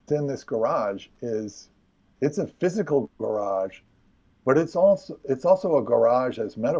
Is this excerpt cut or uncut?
uncut